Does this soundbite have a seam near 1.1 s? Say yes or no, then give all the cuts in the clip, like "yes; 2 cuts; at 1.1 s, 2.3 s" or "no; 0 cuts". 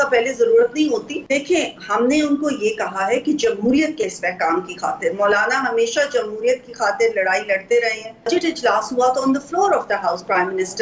yes; 2 cuts; at 1.1 s, 8.3 s